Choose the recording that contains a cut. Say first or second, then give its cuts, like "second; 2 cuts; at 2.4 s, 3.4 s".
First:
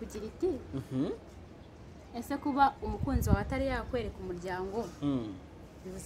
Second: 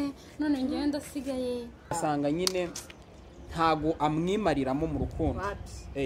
second; 1 cut; at 1.9 s